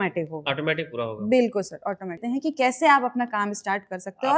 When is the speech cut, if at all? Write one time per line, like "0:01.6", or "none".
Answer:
0:02.2